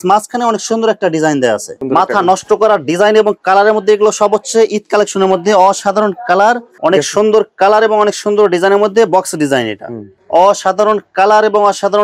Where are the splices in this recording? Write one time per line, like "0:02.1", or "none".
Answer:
0:01.7
0:06.7
0:10.2